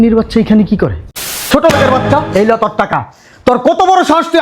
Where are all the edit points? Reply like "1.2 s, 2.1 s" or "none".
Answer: 1.5 s

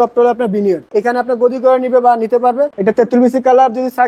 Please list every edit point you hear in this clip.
0.9 s, 2.7 s

